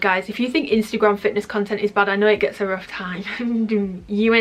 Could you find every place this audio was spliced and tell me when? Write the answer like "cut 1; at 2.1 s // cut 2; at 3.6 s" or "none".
none